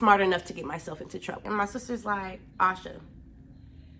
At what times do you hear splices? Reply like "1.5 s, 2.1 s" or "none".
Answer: 1.4 s